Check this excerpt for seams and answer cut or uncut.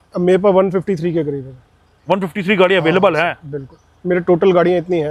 uncut